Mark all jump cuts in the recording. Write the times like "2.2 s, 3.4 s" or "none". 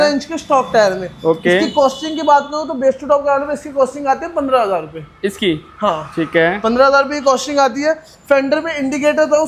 none